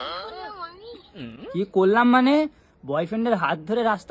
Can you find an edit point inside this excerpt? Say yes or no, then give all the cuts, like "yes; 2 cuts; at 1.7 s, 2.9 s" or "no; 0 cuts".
no; 0 cuts